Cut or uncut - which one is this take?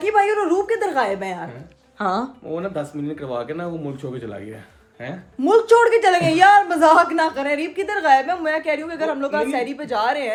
uncut